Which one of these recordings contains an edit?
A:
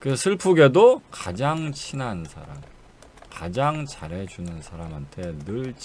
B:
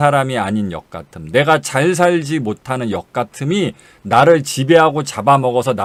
A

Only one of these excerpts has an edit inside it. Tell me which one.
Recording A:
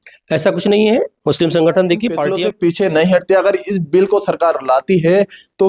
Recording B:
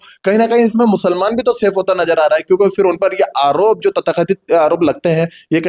A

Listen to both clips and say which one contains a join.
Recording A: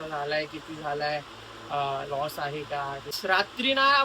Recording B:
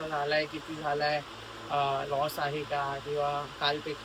A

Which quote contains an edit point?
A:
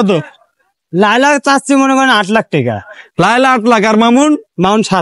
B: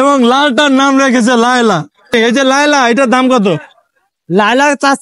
B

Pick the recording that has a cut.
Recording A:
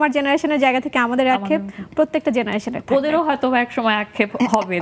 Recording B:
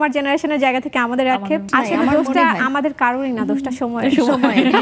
B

